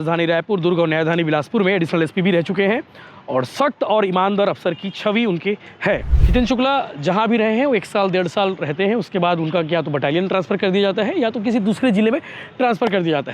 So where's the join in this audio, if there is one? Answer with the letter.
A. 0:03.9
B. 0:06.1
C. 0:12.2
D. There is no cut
B